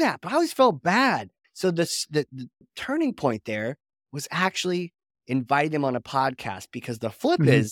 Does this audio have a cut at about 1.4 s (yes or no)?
yes